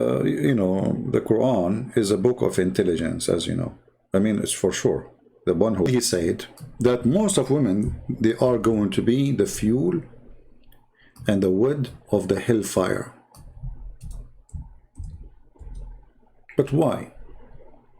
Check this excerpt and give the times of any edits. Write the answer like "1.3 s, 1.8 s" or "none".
5.9 s